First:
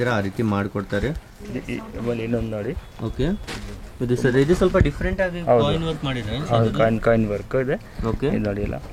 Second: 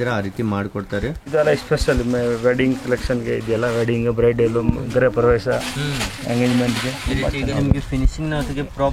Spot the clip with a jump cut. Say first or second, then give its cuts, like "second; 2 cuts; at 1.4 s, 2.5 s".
second; 2 cuts; at 1.3 s, 7.5 s